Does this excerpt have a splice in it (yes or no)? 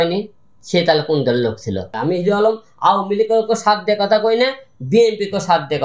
yes